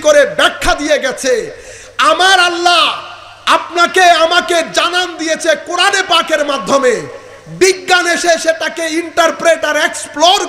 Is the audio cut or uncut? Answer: uncut